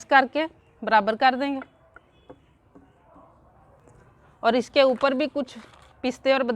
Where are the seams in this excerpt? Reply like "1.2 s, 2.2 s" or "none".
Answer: 3.8 s